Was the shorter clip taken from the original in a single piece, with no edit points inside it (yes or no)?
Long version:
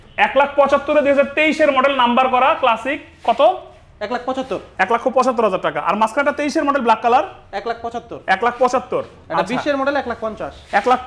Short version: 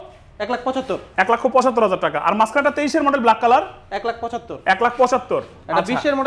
yes